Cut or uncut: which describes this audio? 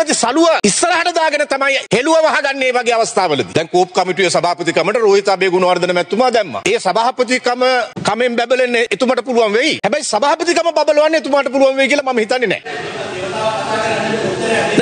cut